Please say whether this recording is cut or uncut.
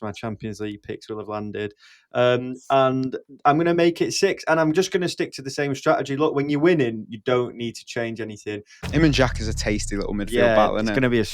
cut